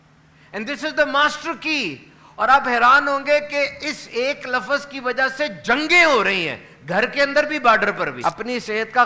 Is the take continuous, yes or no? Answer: no